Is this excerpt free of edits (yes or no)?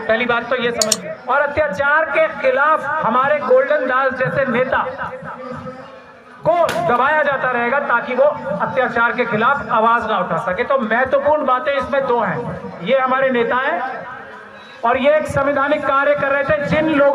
no